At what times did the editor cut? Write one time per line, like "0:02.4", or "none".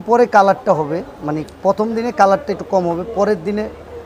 none